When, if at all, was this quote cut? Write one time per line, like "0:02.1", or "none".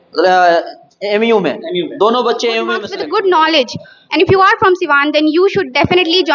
0:02.9